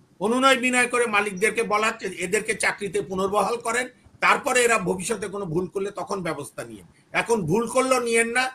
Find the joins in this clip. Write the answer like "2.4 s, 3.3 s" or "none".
none